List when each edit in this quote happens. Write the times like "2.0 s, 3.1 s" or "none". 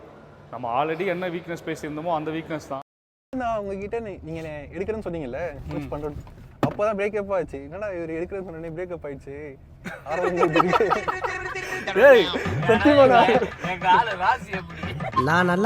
3.3 s